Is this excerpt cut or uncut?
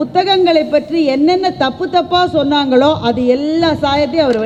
uncut